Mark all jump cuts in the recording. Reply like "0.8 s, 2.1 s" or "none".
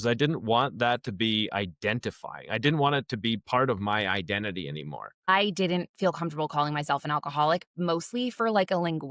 5.3 s